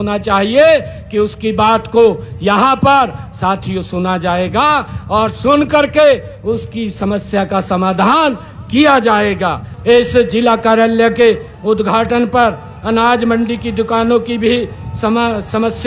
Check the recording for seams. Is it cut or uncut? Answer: cut